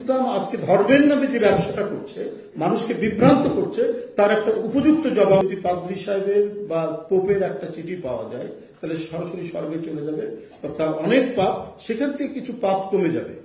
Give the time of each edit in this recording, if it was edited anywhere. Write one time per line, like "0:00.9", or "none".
0:05.4